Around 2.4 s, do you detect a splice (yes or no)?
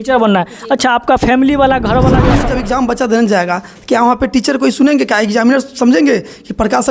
yes